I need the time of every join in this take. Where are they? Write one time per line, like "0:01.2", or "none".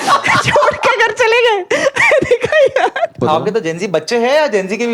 0:03.2